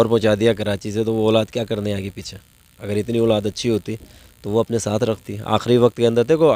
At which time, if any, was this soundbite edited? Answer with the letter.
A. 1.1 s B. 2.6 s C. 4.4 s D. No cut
D